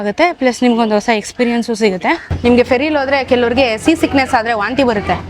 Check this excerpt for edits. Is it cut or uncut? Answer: cut